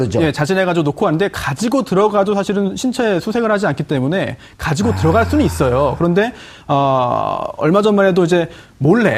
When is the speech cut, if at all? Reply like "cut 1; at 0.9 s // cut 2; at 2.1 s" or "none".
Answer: cut 1; at 7.1 s